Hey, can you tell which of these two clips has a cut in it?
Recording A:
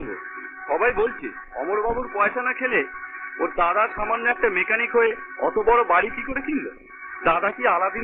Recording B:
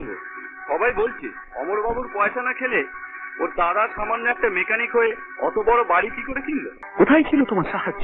B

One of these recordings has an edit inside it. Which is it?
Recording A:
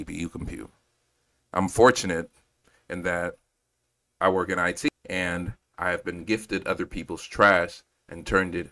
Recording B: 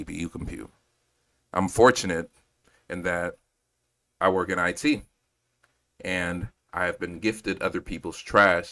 A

